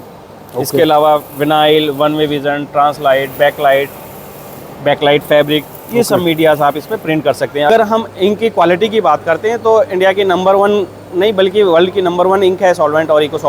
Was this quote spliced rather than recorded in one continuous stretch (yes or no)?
yes